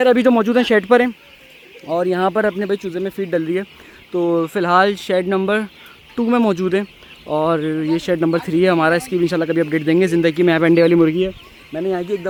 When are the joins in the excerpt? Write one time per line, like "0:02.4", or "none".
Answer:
none